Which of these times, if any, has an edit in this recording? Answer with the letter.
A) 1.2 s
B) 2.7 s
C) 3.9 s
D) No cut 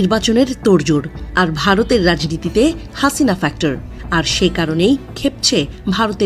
C